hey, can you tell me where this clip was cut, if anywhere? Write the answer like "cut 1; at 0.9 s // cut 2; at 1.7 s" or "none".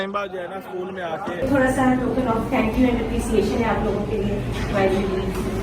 cut 1; at 1.4 s